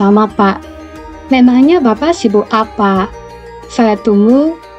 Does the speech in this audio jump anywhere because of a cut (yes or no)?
no